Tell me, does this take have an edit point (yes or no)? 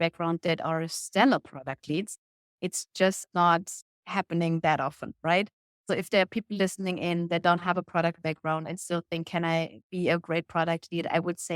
yes